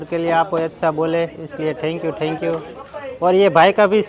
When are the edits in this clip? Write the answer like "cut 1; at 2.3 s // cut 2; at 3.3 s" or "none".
none